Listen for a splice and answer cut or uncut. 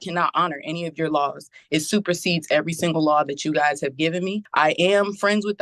cut